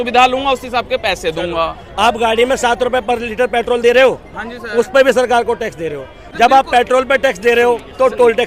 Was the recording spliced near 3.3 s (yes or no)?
no